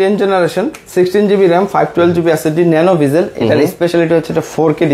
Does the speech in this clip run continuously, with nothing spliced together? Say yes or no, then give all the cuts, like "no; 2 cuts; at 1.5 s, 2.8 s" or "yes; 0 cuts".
yes; 0 cuts